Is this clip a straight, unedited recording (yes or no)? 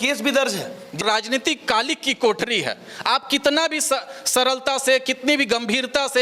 no